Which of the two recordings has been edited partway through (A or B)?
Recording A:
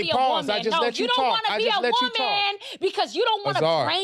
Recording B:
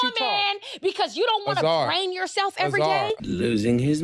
B